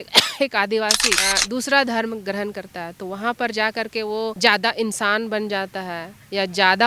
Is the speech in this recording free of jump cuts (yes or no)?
no